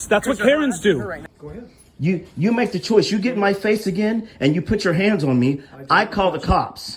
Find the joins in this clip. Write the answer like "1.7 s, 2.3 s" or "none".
1.2 s

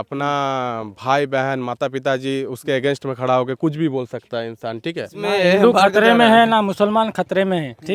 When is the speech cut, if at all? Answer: 5.1 s

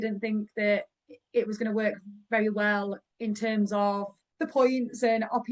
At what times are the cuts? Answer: 3.1 s, 4.2 s

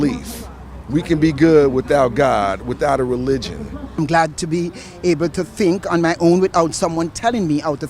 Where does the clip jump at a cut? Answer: 4.0 s

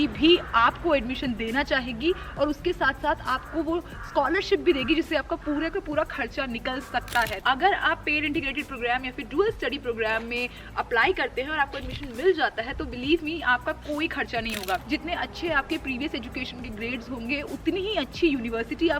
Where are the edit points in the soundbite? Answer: 7.4 s, 14.8 s

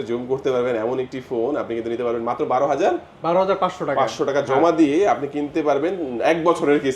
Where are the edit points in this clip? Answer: none

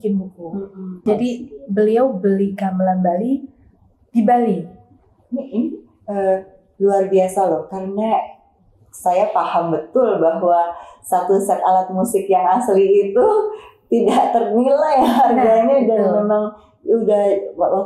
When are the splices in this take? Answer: 1.1 s

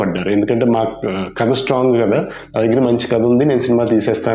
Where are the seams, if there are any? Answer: none

